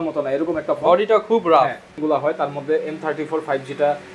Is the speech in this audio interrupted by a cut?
yes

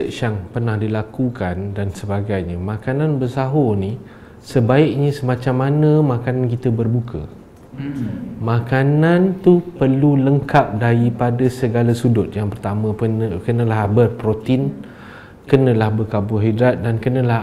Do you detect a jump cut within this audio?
no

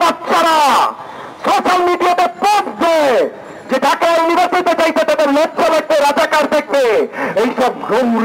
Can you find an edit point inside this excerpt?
no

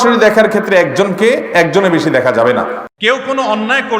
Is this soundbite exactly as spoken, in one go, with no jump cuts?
no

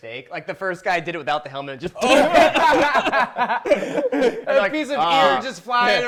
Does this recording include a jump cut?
no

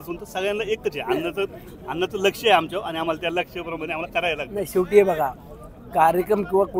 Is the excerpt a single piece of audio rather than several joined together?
yes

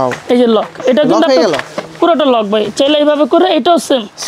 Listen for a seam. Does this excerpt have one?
no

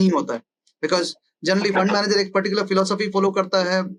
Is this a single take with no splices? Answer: yes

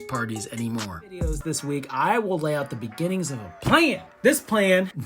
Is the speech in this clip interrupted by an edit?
yes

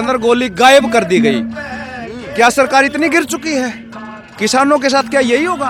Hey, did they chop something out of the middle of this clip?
no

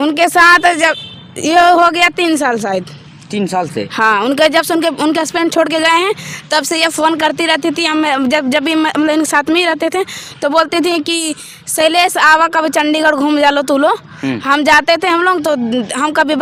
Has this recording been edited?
no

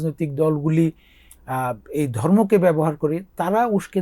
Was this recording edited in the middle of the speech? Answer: no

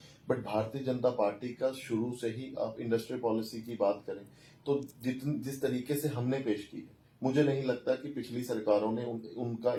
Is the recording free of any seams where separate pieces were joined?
yes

